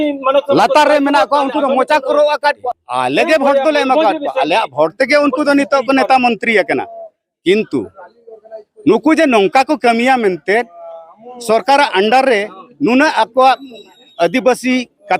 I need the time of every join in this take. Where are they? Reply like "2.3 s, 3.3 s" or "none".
2.6 s

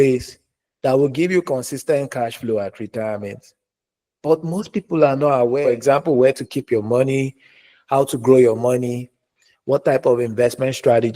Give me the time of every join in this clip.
5.6 s

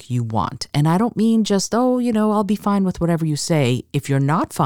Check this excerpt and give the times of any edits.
none

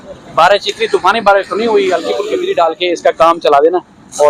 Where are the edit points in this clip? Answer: 2.3 s

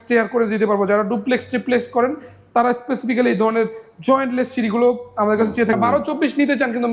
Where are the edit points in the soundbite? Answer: 5.7 s

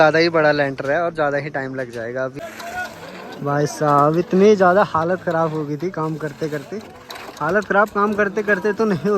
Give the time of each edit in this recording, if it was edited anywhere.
2.3 s

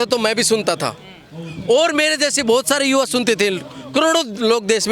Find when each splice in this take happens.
none

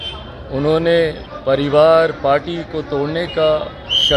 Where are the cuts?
1.3 s

